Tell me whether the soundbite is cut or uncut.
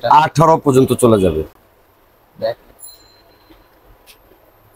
uncut